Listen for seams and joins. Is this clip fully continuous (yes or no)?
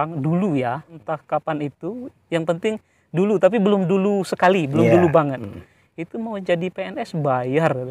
no